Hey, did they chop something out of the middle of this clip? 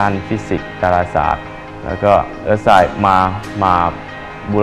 no; 0 cuts

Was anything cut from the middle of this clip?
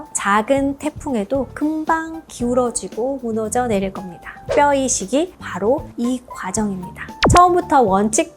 yes; 1 cut; at 7.2 s

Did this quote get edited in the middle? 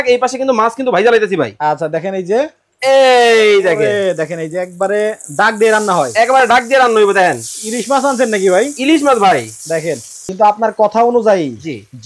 yes; 1 cut; at 10.3 s

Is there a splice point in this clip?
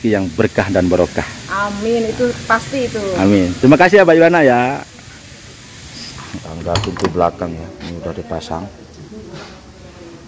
yes; 1 cut; at 6.4 s

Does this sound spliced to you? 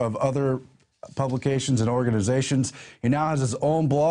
yes; 1 cut; at 2.8 s

